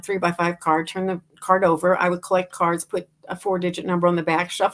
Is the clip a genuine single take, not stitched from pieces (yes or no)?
yes